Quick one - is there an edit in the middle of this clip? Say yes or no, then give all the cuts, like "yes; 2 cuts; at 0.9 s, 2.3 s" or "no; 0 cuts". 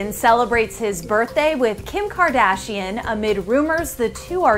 no; 0 cuts